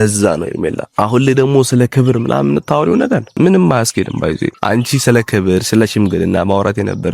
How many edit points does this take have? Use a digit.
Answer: 3